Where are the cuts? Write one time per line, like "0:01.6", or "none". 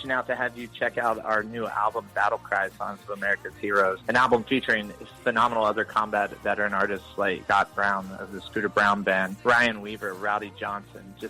none

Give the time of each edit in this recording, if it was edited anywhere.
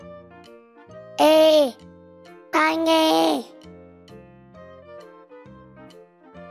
none

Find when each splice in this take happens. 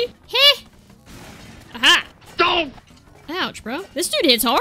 none

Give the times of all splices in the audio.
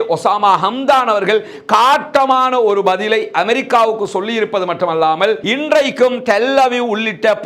0:05.4

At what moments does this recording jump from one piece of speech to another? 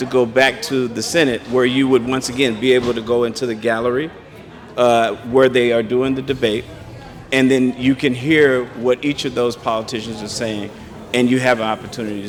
none

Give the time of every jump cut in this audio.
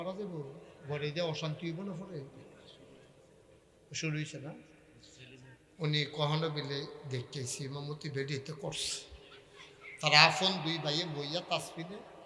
0:09.9

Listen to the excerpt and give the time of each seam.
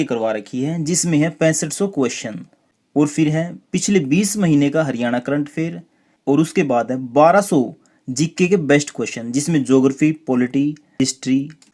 none

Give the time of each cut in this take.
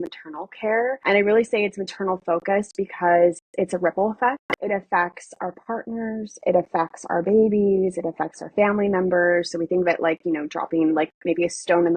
0:01.0
0:04.5

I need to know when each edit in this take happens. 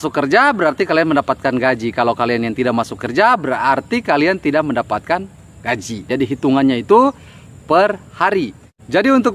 0:06.1

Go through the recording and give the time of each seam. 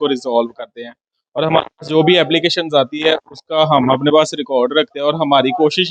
none

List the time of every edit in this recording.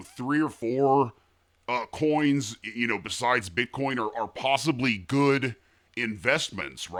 none

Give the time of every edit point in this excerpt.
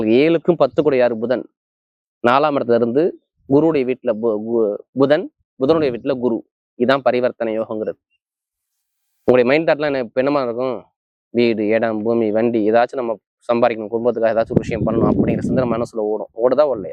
none

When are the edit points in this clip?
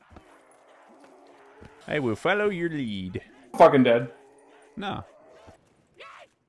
0:01.8
0:05.6

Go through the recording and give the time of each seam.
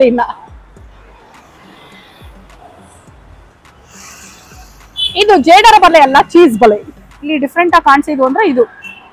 0:07.3

